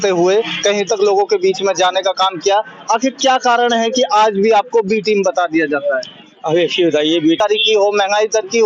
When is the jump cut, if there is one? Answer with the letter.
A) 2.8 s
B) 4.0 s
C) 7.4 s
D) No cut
C